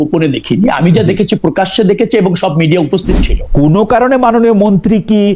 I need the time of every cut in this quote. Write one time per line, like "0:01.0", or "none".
0:03.4